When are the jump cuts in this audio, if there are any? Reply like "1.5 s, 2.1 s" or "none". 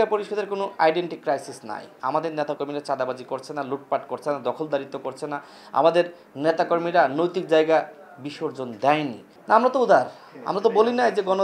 1.9 s, 9.3 s